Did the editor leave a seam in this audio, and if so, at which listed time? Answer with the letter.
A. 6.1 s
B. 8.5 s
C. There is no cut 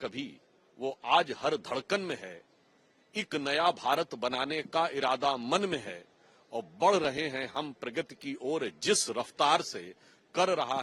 C